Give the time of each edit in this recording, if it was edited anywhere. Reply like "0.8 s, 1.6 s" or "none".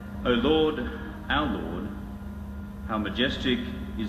1.1 s